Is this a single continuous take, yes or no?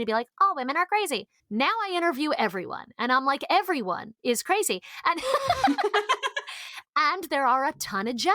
no